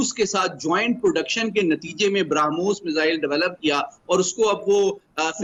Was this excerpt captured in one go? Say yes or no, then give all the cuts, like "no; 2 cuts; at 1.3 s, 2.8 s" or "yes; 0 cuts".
yes; 0 cuts